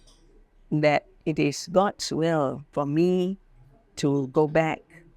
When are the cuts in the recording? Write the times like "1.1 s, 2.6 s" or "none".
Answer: 2.6 s

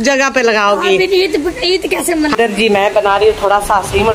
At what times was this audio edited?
2.4 s

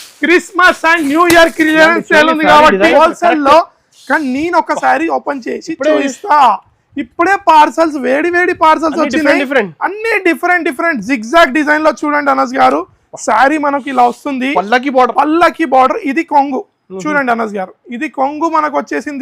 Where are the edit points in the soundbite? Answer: 2.9 s

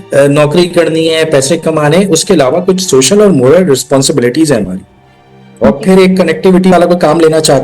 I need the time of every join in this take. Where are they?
6.7 s

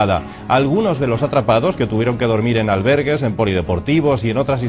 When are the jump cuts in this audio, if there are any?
1.8 s

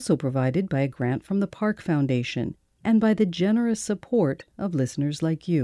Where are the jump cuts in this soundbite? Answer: 2.6 s

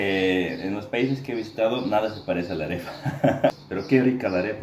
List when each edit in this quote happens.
3.5 s

